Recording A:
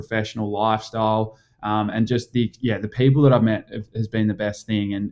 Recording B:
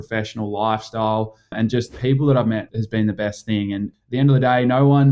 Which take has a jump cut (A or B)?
B